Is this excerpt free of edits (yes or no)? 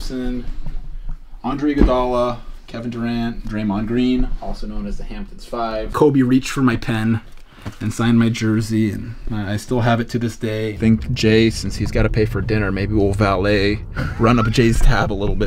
no